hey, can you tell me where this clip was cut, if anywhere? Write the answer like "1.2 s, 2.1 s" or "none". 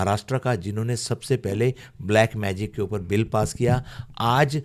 none